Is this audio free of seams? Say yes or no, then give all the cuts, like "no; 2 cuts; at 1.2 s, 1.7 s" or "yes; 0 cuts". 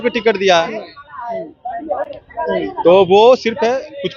yes; 0 cuts